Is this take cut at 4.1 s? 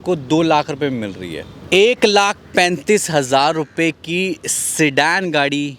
no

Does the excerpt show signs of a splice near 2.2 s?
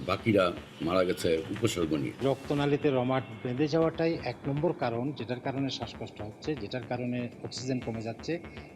yes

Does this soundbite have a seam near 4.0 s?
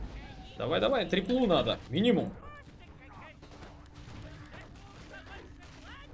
no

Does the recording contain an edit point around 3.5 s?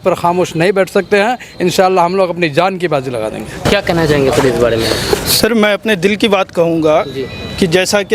no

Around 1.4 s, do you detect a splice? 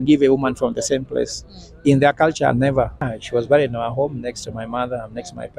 no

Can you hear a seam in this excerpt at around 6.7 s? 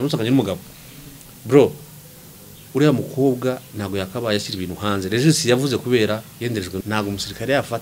yes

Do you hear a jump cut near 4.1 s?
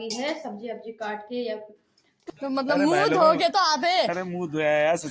no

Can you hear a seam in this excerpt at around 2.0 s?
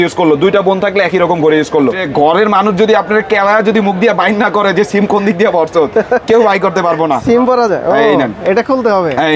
yes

